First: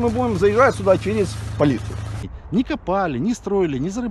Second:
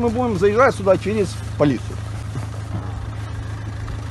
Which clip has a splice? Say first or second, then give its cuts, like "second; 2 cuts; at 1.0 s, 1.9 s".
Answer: first; 1 cut; at 2.4 s